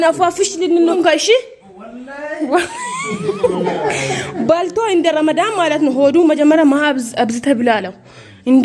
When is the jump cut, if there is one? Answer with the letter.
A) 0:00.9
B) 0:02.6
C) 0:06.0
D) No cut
A